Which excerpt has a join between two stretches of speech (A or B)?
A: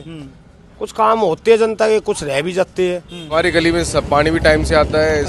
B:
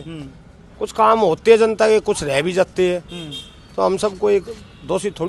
A